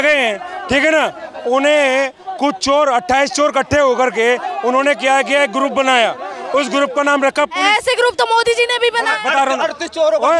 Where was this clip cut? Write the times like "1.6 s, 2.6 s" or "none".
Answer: none